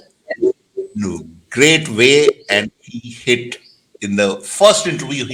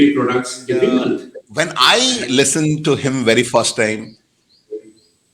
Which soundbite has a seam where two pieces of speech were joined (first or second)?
second